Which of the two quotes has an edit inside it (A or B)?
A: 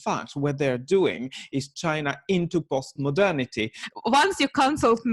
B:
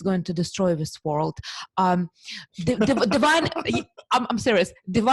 A